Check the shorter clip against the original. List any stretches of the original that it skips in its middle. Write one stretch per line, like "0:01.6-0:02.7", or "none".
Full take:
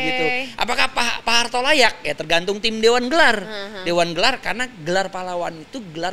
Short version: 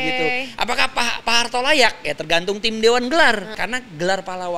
0:03.6-0:04.4